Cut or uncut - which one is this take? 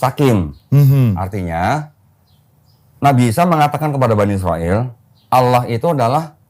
uncut